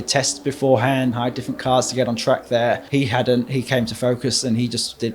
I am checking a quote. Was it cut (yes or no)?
yes